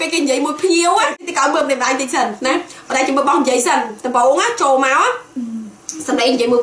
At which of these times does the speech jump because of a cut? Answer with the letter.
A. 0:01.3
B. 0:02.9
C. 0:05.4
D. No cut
A